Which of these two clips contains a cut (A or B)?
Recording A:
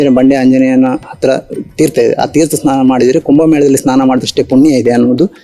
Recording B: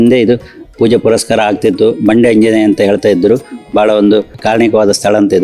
B